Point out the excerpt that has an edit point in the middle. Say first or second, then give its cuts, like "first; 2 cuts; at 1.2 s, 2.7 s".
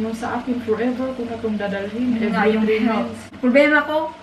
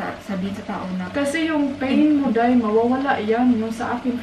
first; 1 cut; at 3.3 s